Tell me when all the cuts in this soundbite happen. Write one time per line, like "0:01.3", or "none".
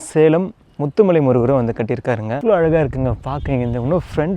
0:02.3